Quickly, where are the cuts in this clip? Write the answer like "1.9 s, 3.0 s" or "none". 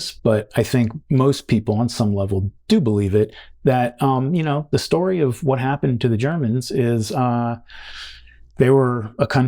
1.0 s